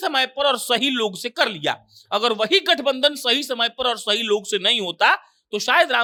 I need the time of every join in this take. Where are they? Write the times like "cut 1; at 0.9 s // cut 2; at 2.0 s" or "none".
none